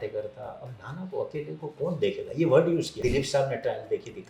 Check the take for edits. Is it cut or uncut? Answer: cut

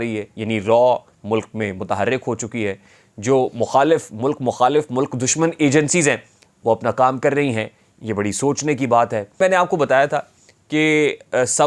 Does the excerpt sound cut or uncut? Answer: cut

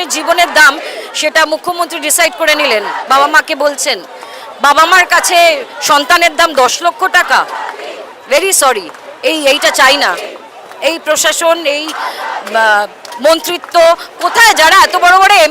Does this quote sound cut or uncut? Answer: uncut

